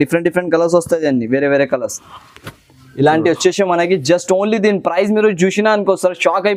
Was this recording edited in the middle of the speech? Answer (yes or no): no